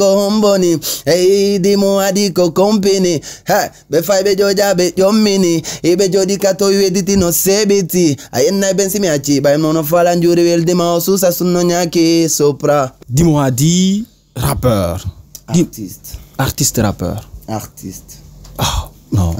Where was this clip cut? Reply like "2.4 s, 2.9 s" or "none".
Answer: 13.0 s

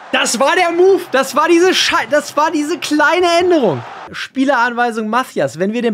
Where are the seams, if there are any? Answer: 4.2 s

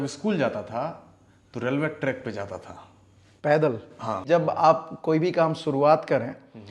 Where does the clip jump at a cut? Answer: 4.2 s

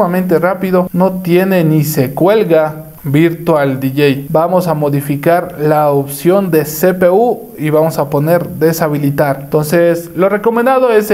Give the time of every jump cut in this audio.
4.2 s, 9.5 s

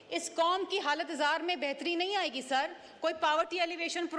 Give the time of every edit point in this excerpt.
none

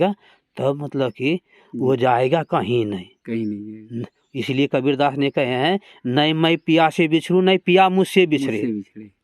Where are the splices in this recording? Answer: none

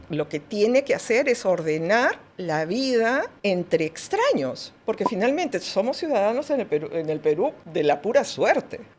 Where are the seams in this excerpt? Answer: none

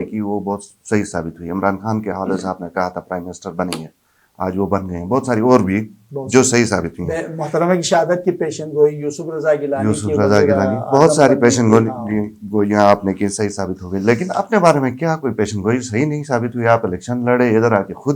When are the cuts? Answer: none

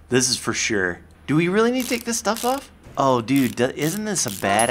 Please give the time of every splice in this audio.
1.1 s, 2.8 s

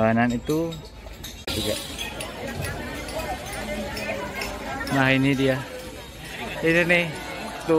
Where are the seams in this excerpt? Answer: 1.5 s

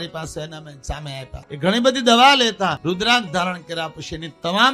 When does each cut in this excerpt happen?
1.4 s, 2.8 s

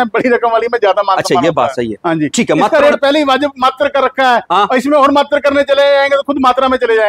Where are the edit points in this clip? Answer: none

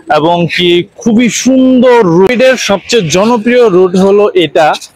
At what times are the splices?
2.3 s

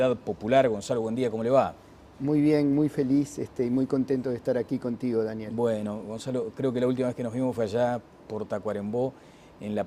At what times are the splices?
none

